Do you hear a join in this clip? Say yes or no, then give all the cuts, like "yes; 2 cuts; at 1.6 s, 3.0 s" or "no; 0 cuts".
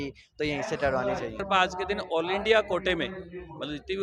yes; 1 cut; at 1.4 s